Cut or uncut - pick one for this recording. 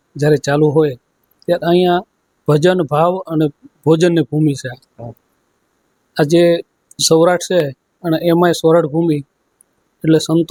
uncut